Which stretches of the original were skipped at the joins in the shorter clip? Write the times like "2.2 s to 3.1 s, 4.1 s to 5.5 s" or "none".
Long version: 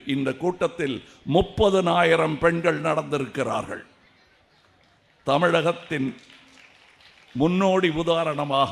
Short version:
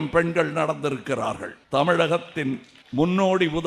3.8 s to 5.1 s, 6.3 s to 7.2 s